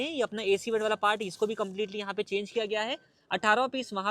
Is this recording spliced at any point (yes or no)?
no